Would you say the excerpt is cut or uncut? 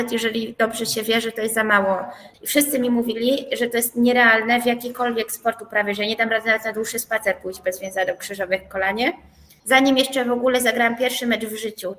cut